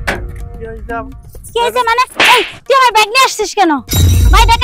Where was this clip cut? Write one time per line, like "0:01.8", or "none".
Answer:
none